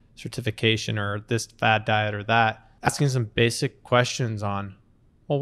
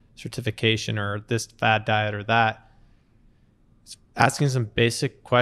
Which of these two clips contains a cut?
first; 1 cut; at 2.9 s

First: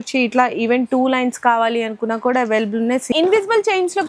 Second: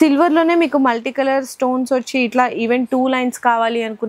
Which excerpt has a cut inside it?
first; 1 cut; at 3.1 s

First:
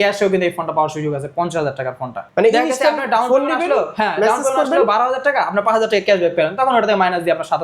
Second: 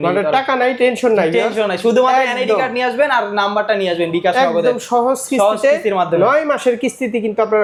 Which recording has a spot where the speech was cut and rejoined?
first; 1 cut; at 2.2 s

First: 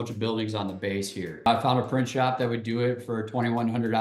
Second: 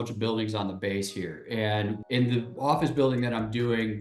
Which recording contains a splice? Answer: first; 1 cut; at 1.5 s

